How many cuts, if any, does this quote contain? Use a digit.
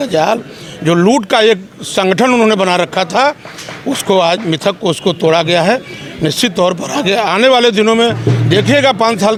0